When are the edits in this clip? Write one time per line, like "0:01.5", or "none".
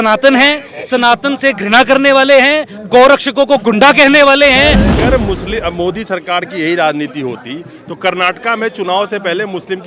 0:04.9